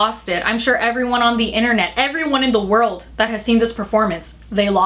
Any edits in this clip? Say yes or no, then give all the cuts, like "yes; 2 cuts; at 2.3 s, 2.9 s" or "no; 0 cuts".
no; 0 cuts